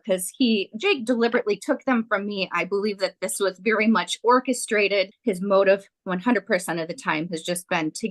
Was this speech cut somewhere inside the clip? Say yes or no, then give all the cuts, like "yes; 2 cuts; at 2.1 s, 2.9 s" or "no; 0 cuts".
yes; 1 cut; at 5.1 s